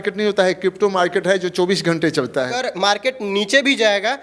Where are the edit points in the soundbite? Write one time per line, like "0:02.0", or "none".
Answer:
0:02.6